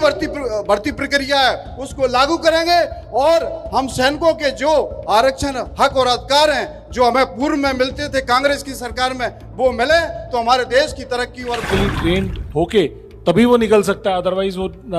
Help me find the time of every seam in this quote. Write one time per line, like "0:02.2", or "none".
0:11.7